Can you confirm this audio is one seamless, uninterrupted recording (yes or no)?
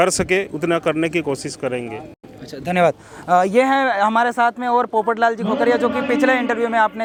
yes